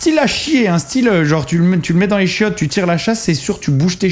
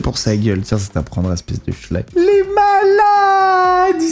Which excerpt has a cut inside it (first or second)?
second